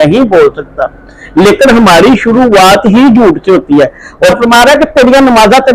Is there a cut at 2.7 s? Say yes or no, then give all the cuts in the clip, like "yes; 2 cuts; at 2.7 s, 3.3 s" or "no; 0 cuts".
no; 1 cut; at 4.4 s